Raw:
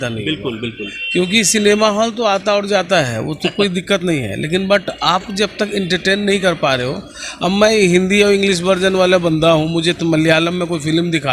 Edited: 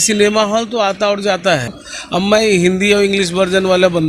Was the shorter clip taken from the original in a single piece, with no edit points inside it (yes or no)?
no